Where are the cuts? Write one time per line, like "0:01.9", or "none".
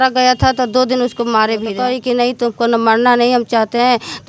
0:01.7